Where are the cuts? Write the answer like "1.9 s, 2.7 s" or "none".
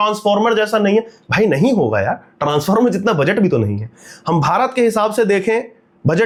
none